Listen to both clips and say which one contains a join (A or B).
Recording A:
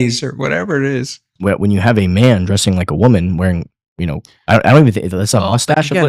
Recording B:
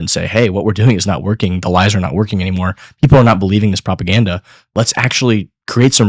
A